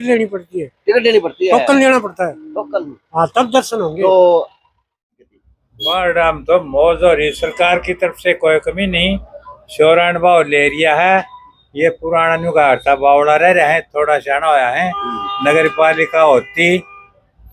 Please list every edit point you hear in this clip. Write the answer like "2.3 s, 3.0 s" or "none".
5.2 s